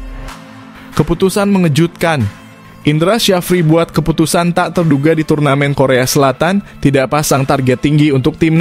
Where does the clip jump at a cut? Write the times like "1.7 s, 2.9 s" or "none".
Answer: 0.9 s